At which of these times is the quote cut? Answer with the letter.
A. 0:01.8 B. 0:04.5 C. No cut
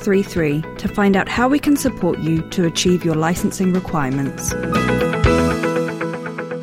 B